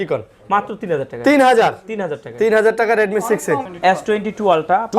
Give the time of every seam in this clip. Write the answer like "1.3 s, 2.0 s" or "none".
3.7 s